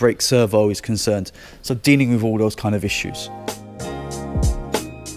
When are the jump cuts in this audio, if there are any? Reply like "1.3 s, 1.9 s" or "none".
3.2 s